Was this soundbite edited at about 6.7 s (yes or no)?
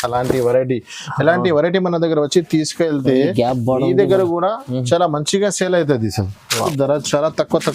yes